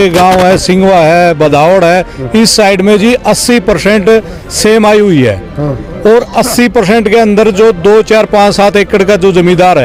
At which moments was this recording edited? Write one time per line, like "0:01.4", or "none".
none